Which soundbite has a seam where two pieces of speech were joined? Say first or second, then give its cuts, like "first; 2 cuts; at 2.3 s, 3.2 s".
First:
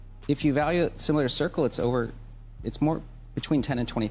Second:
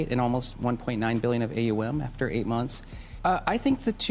second; 1 cut; at 3.1 s